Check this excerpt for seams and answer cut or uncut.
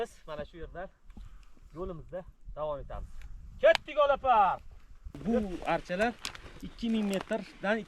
cut